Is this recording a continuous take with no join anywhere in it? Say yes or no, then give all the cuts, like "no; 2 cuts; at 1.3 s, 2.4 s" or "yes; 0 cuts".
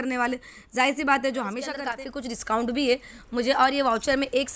no; 1 cut; at 1.9 s